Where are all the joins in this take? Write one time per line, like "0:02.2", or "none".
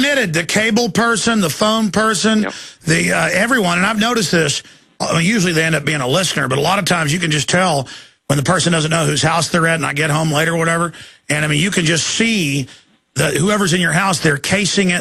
0:03.6